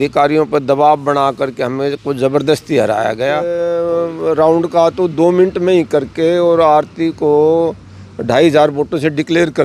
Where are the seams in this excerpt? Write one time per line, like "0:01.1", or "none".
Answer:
0:03.8